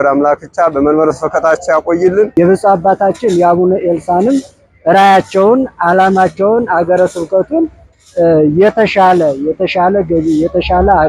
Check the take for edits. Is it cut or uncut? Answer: cut